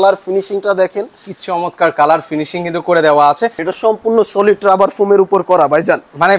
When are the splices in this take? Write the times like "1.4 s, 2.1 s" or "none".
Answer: 3.6 s